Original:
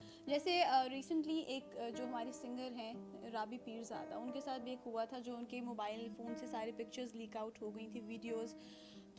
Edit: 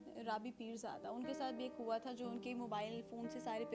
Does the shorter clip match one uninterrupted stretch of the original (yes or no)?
yes